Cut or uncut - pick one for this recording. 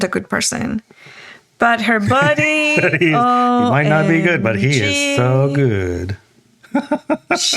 uncut